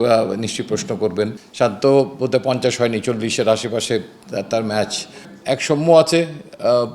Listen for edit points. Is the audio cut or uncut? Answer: cut